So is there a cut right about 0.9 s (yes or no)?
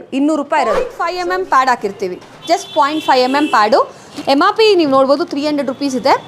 yes